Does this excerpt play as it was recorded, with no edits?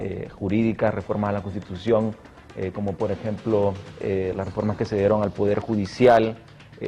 no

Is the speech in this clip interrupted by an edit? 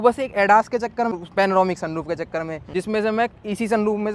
yes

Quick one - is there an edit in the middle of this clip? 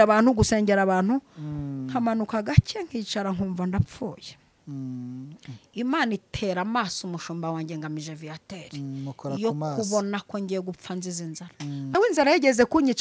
yes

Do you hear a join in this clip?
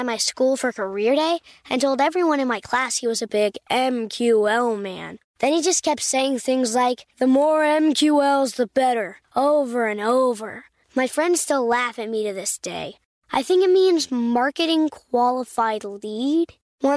no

